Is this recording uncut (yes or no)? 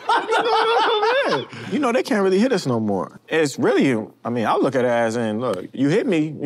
no